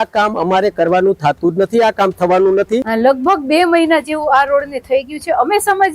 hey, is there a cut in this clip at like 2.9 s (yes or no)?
yes